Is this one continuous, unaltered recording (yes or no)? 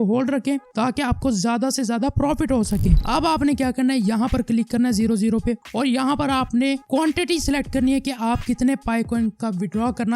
no